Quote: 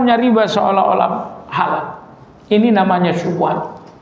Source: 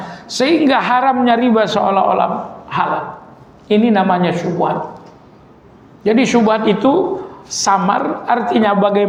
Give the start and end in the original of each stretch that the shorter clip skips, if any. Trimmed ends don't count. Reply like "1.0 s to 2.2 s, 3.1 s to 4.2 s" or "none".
none